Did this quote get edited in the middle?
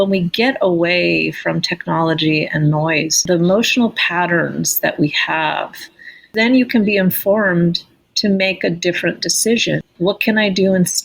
yes; 3 cuts; at 3.2 s, 6.3 s, 9.8 s

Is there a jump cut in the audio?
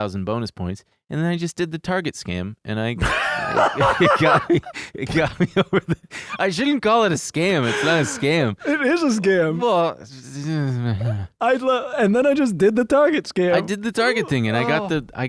no; 0 cuts

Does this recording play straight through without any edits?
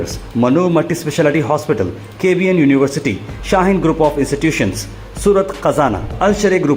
yes; 0 cuts

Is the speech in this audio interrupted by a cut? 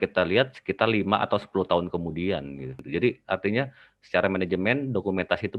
yes; 1 cut; at 2.8 s

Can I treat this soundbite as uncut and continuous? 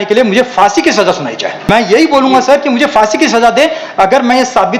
no; 1 cut; at 1.7 s

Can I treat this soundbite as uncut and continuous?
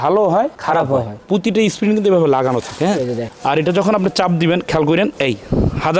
no; 2 cuts; at 1.2 s, 3.3 s

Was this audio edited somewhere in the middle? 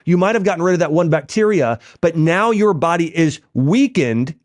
no; 0 cuts

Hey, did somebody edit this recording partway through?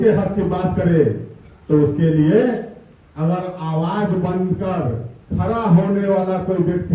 no; 0 cuts

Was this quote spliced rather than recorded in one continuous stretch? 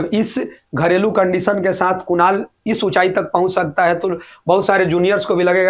no; 0 cuts

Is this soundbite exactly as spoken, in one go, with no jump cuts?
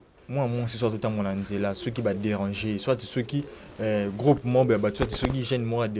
yes; 0 cuts

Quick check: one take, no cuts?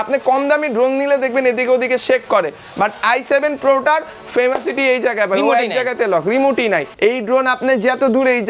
no; 1 cut; at 6.9 s

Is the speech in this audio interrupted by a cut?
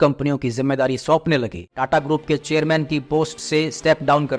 yes; 1 cut; at 1.7 s

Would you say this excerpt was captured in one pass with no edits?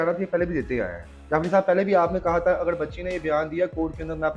yes; 0 cuts

